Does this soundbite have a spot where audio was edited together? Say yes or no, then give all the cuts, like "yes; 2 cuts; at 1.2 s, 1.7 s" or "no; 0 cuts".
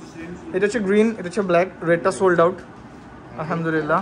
no; 0 cuts